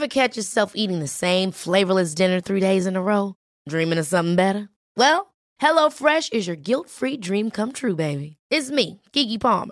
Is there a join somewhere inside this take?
no; 0 cuts

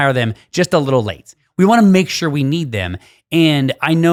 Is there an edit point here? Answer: no; 0 cuts

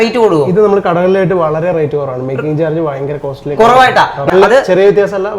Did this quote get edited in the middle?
yes; 1 cut; at 4.3 s

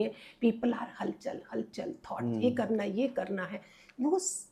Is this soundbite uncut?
yes; 0 cuts

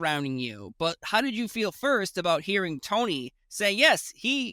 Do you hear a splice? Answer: no; 0 cuts

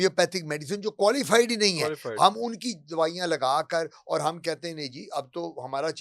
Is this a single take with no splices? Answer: yes; 0 cuts

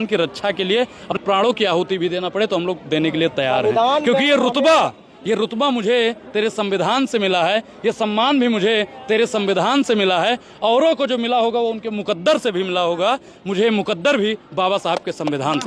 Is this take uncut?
no; 1 cut; at 1.2 s

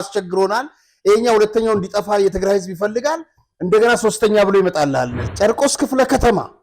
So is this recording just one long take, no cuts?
no; 1 cut; at 5.2 s

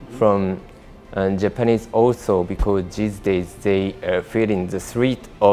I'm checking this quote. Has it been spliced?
no; 0 cuts

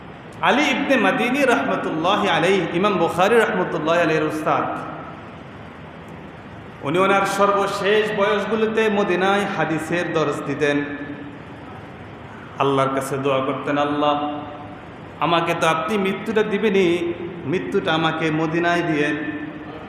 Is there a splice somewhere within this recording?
no; 0 cuts

